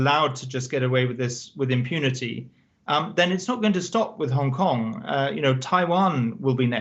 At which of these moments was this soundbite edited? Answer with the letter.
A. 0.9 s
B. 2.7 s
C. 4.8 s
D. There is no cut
D